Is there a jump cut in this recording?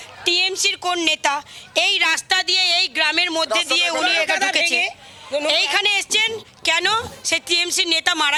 no; 0 cuts

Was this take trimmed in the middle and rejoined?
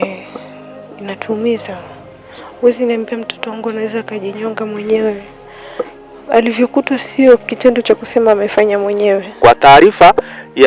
yes; 1 cut; at 9.3 s

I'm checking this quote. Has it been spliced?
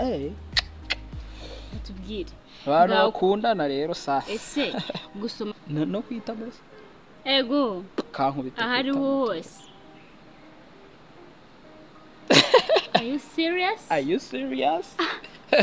yes; 1 cut; at 5.5 s

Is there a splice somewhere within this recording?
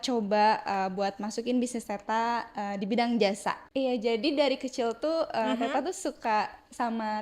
yes; 1 cut; at 3.6 s

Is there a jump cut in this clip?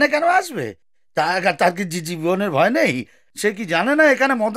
no; 0 cuts

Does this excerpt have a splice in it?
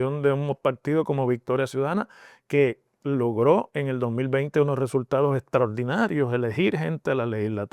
no; 0 cuts

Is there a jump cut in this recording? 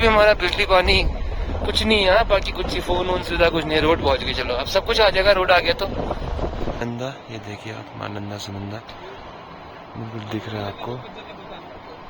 yes; 1 cut; at 6.8 s

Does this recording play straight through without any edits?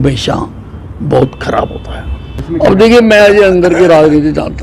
no; 1 cut; at 2.3 s

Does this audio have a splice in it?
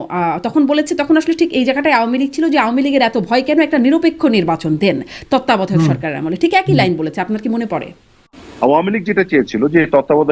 yes; 1 cut; at 8.4 s

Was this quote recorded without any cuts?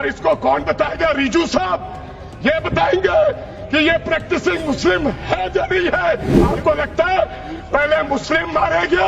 no; 1 cut; at 6.4 s

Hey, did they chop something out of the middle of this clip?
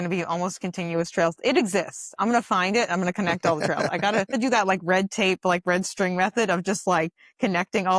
yes; 1 cut; at 4.3 s

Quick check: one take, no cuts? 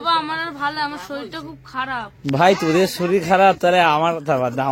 yes; 0 cuts

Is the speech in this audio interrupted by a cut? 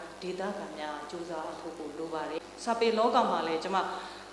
yes; 1 cut; at 2.4 s

